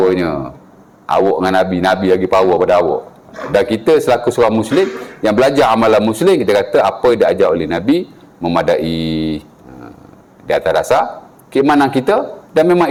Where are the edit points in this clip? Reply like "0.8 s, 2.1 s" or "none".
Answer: none